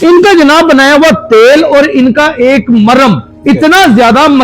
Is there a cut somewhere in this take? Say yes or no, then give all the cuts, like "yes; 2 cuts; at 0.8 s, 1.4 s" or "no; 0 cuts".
yes; 1 cut; at 3.3 s